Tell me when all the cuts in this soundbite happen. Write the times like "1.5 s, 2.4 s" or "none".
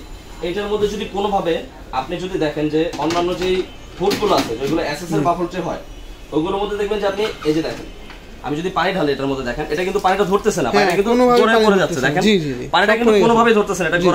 none